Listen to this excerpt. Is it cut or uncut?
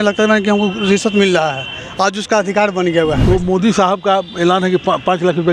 cut